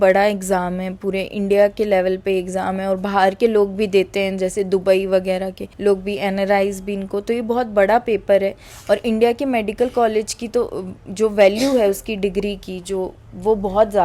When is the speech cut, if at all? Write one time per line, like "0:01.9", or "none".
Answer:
none